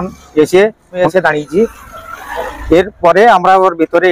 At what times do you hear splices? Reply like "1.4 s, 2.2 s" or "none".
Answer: 1.0 s